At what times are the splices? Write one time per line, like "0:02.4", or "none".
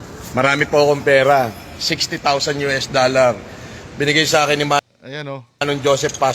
none